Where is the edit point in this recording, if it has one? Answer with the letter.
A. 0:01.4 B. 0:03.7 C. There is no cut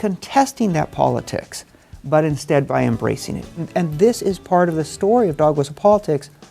B